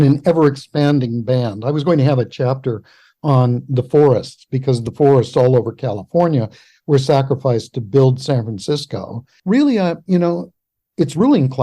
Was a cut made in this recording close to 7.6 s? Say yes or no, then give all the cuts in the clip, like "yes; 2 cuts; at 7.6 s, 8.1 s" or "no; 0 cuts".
no; 1 cut; at 9.3 s